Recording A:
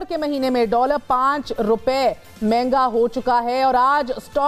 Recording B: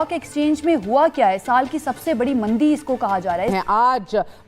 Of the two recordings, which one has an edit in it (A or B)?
B